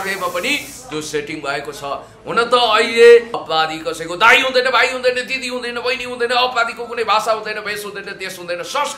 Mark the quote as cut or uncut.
cut